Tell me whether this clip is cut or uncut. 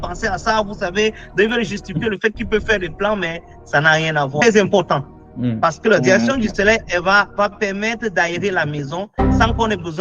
cut